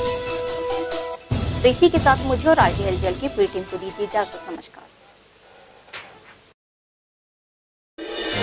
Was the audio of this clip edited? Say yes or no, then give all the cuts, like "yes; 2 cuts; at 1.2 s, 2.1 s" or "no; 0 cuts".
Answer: no; 0 cuts